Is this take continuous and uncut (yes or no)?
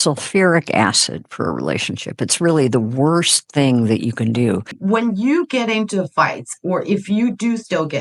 no